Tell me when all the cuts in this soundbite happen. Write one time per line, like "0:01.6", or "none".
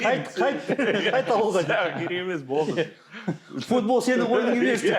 none